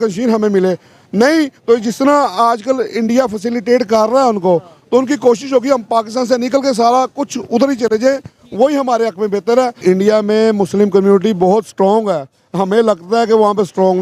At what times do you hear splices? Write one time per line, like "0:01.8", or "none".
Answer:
0:09.8